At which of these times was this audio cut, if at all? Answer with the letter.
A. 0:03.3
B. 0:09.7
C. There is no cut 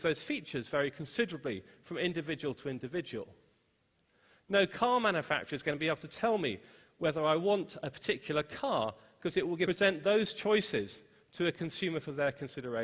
C